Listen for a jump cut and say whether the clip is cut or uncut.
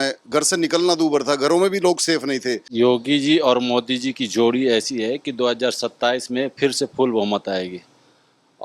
cut